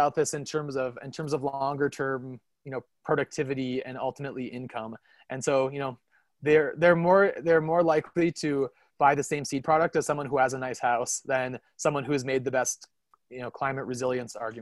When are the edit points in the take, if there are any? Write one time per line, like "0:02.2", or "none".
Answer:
none